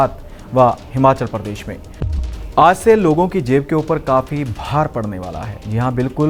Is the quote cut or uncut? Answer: cut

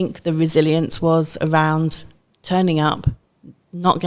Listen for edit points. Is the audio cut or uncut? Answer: uncut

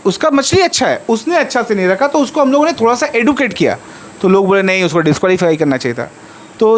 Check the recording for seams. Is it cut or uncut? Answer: uncut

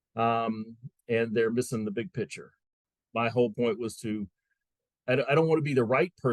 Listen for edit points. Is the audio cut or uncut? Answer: cut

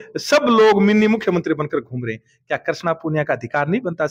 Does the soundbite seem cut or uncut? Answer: uncut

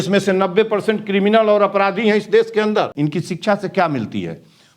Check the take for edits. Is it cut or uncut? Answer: cut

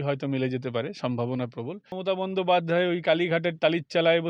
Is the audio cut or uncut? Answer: cut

